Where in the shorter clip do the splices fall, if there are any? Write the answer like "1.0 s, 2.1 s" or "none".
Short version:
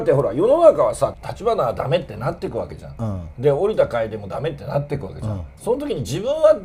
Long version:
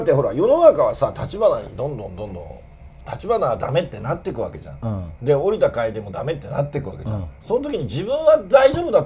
1.2 s

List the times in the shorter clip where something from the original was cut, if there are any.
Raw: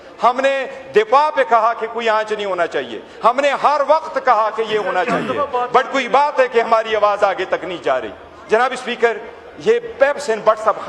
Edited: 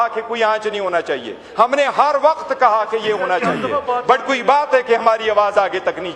none

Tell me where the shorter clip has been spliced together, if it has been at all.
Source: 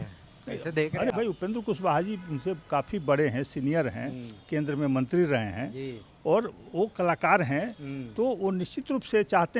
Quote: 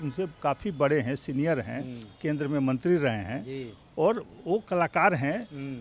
none

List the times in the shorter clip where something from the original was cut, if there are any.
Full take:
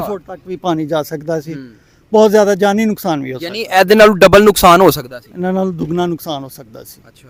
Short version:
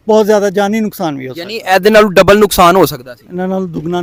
none

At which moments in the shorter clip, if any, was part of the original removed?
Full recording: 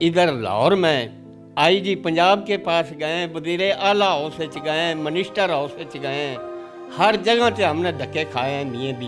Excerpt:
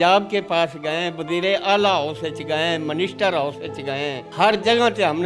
4.2 s

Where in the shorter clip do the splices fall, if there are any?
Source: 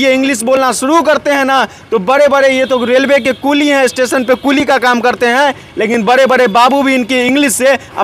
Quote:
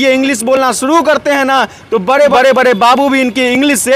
2.3 s

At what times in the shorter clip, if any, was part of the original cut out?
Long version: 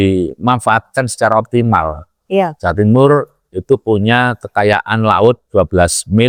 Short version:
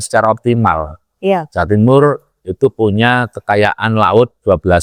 none

